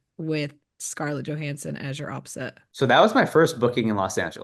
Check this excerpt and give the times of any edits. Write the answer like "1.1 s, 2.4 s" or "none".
2.6 s